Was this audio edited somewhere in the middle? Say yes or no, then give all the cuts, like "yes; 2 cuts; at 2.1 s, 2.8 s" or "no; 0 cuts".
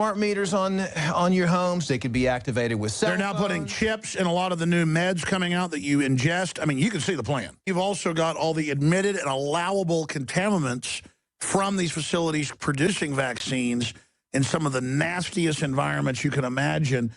yes; 1 cut; at 7.6 s